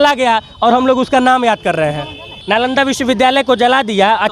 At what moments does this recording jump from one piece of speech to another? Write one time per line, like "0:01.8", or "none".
0:02.4